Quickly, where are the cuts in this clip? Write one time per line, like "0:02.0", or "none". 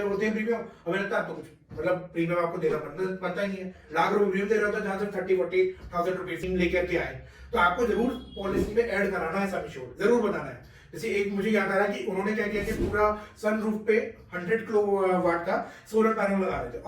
0:06.5